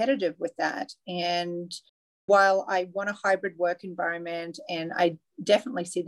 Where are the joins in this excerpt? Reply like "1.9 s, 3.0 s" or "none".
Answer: none